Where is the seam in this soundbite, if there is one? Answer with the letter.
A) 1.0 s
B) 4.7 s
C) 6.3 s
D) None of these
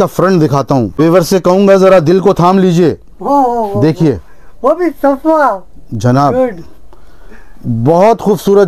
A